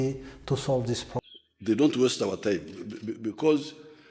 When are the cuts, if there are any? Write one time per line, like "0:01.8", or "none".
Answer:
0:01.2